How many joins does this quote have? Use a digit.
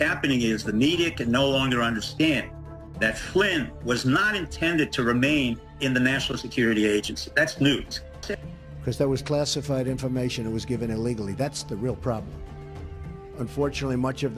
0